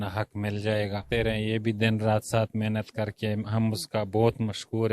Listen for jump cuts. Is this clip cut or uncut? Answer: cut